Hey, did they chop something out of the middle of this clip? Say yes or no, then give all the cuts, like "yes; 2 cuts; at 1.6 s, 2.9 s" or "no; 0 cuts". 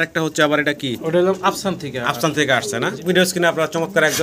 yes; 1 cut; at 3.0 s